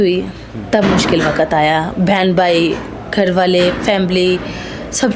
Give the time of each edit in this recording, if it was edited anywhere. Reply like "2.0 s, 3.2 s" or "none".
none